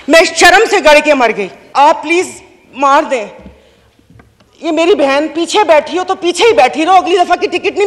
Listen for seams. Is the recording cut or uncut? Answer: cut